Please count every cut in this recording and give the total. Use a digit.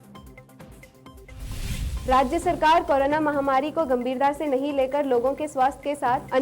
1